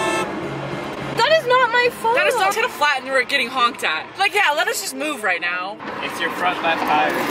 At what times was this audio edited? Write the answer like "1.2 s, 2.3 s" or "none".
none